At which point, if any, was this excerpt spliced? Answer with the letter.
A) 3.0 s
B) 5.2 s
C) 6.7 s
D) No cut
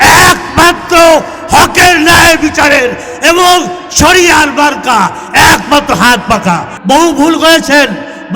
C